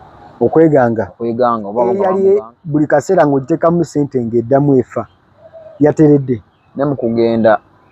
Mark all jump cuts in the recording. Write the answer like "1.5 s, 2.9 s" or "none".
1.9 s